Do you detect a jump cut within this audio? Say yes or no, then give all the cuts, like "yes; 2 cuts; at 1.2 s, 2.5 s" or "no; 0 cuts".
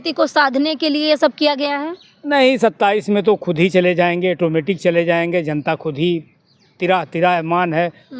no; 0 cuts